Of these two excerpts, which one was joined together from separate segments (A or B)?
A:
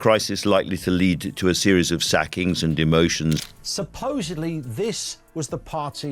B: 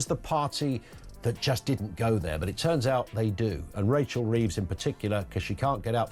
A